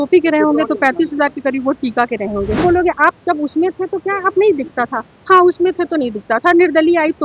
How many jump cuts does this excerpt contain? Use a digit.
1